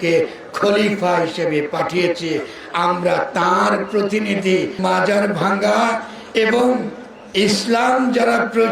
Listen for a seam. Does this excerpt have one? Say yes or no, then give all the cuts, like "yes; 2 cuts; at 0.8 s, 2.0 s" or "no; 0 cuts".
yes; 1 cut; at 4.8 s